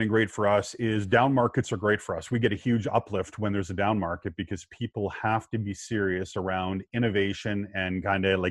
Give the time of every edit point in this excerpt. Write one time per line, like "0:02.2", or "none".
none